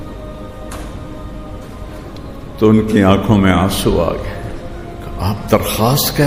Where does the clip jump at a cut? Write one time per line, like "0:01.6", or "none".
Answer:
none